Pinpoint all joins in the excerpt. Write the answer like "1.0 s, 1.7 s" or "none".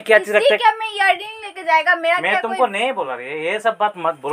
none